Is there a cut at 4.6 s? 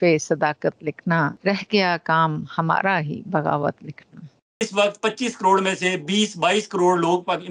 yes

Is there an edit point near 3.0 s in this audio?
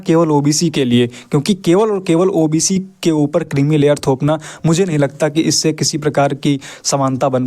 no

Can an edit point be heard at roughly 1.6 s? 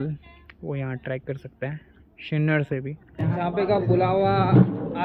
no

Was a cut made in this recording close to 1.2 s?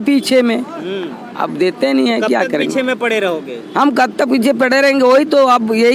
no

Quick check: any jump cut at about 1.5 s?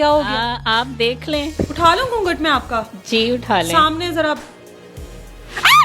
yes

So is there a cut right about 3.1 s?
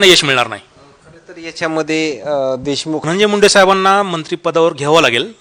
yes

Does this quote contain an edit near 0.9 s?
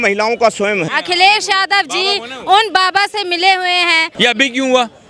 yes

